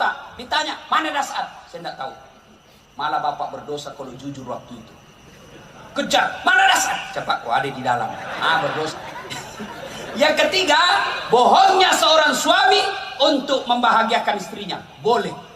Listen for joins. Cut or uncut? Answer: cut